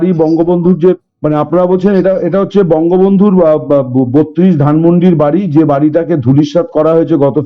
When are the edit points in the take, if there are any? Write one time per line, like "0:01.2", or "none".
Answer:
0:01.1